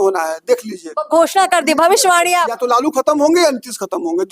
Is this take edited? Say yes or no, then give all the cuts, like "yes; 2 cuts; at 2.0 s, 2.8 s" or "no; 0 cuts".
yes; 1 cut; at 2.6 s